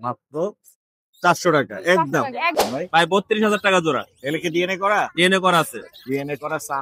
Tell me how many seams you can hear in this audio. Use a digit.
1